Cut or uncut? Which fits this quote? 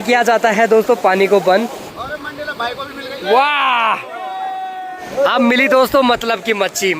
cut